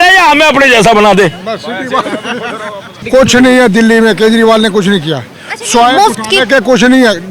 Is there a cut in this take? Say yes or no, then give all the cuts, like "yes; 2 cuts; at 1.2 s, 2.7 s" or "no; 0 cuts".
yes; 1 cut; at 3.0 s